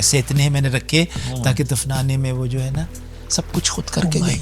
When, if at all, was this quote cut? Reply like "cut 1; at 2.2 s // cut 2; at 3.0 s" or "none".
none

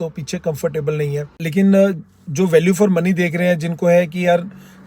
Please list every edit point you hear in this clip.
cut 1; at 1.4 s

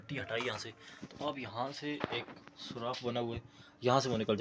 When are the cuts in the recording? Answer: none

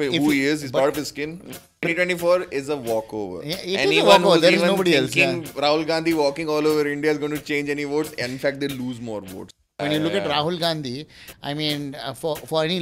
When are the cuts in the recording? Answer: cut 1; at 1.8 s // cut 2; at 9.8 s

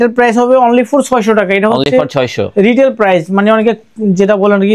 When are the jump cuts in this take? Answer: none

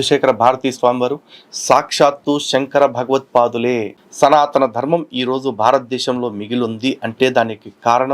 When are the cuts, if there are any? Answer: cut 1; at 4.0 s

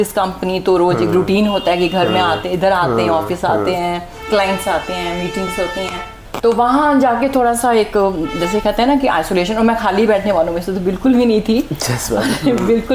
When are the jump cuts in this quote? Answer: cut 1; at 6.2 s

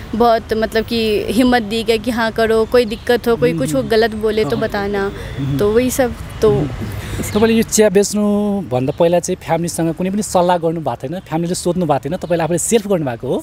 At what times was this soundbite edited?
none

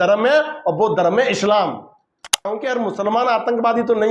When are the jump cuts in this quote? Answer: cut 1; at 2.5 s

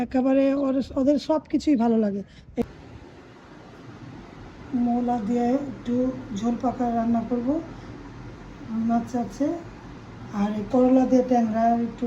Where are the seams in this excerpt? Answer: cut 1; at 2.6 s

